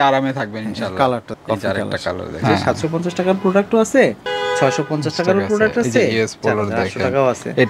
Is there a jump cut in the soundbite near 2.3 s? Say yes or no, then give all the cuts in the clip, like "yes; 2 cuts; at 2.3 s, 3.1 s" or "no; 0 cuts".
yes; 1 cut; at 2.3 s